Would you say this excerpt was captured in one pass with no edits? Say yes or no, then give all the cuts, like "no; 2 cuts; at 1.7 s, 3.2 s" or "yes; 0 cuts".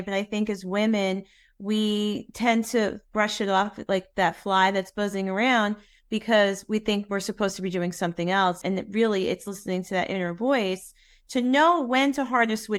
no; 2 cuts; at 3.1 s, 8.6 s